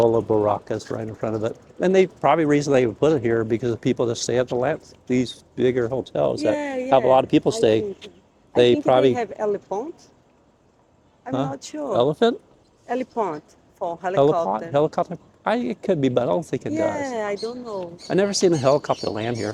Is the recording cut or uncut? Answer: uncut